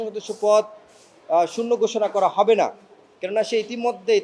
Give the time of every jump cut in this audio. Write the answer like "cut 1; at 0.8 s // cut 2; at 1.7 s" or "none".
none